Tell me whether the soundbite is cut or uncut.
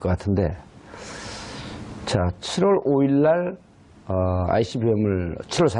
cut